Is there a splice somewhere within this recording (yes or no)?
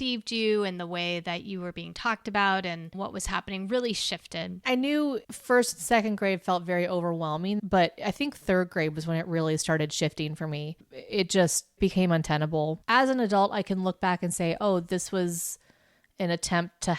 yes